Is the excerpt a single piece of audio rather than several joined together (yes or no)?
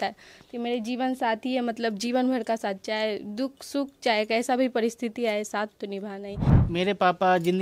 no